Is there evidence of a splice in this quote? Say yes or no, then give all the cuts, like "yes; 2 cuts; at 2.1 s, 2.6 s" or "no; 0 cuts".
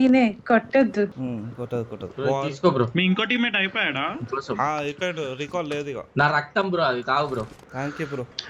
no; 0 cuts